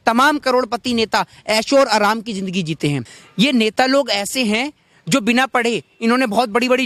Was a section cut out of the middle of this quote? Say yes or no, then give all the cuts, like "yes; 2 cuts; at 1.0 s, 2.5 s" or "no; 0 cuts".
no; 0 cuts